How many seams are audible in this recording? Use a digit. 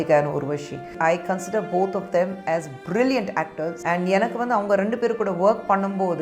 2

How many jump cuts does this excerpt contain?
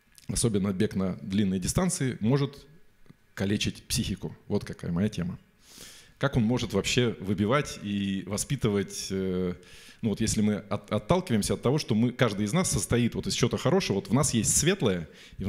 0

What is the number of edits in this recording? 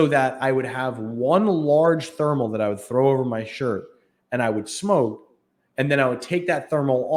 0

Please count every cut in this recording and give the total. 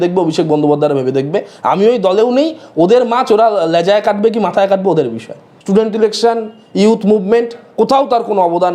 1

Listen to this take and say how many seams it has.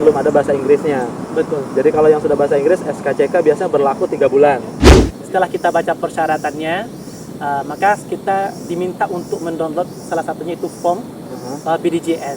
1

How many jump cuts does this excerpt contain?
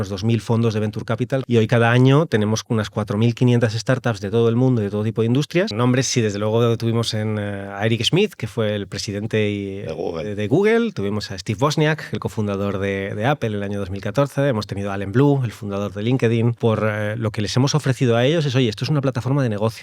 3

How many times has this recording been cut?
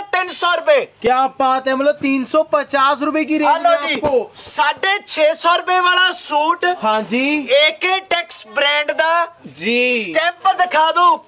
0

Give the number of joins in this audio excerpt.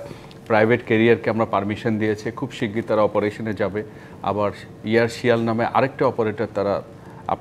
0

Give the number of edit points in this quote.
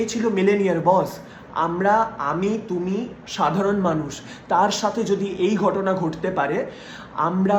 0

